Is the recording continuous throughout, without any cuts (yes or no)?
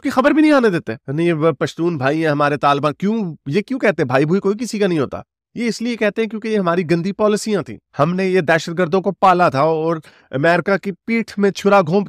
yes